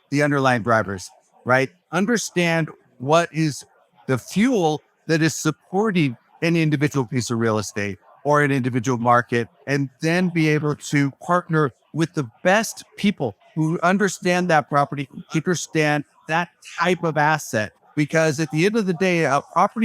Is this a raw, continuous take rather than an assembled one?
yes; 0 cuts

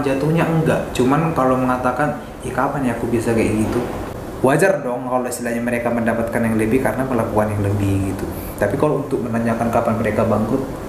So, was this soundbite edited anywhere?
yes; 1 cut; at 4.0 s

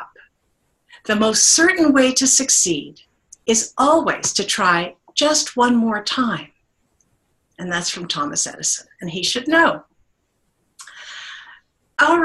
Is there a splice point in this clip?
yes; 1 cut; at 2.5 s

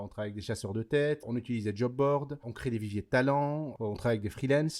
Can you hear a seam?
yes; 2 cuts; at 1.2 s, 2.5 s

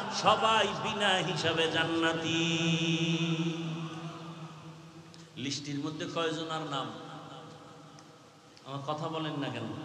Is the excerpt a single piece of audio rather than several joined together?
yes; 0 cuts

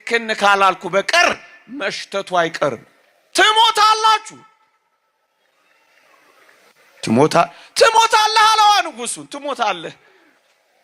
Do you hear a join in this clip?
no; 0 cuts

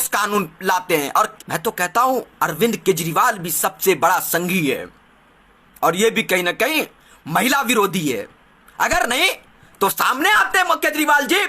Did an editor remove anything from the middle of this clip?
yes; 1 cut; at 1.3 s

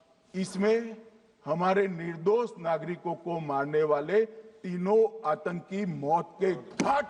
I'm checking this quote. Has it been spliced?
no; 0 cuts

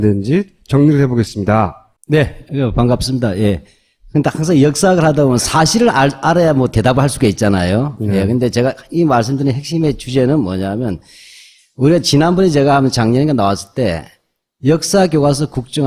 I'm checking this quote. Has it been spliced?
no; 0 cuts

